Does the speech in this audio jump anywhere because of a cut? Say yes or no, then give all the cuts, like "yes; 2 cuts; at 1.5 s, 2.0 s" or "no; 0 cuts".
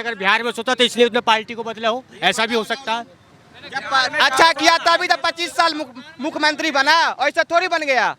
no; 0 cuts